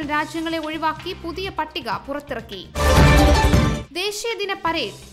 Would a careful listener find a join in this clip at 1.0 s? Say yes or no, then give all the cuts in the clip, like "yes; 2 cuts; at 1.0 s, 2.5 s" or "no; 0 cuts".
no; 0 cuts